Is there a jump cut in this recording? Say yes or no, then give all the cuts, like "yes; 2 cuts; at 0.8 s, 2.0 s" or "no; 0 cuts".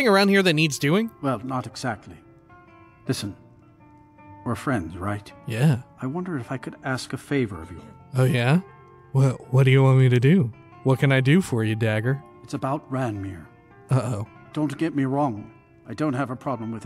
no; 0 cuts